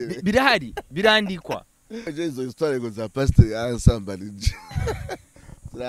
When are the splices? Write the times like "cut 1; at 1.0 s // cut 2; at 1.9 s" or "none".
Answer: cut 1; at 1.9 s